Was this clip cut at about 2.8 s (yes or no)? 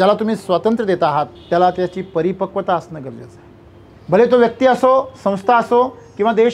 no